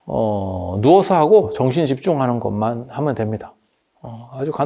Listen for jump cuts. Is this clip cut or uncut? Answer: uncut